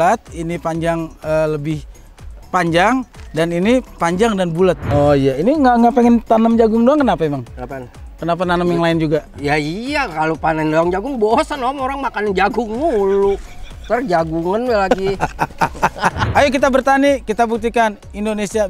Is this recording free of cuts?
no; 2 cuts; at 4.8 s, 16.2 s

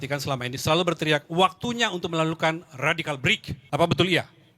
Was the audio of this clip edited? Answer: yes; 1 cut; at 3.5 s

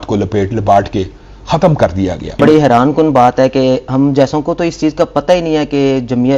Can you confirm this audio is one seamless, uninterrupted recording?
no; 1 cut; at 2.4 s

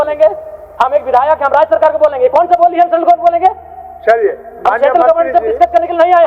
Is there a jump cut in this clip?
no; 0 cuts

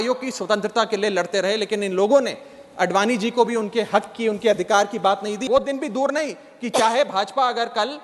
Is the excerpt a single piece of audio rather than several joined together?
no; 1 cut; at 5.4 s

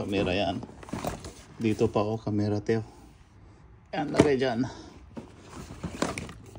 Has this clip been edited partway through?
no; 0 cuts

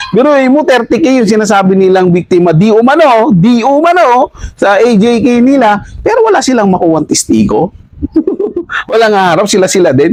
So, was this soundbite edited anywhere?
no; 0 cuts

